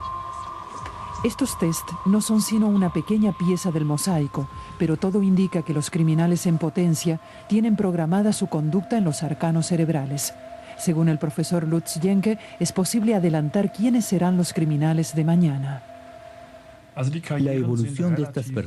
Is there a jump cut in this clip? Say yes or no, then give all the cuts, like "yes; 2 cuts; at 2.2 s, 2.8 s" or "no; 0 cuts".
yes; 1 cut; at 15.3 s